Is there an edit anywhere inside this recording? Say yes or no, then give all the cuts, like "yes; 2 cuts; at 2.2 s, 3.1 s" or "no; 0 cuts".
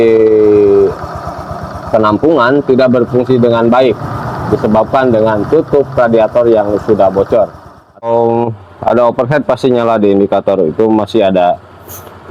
yes; 1 cut; at 8.0 s